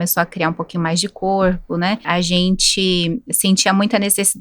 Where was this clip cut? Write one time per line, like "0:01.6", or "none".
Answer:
0:02.0